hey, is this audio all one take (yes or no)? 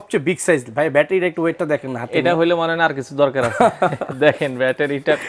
yes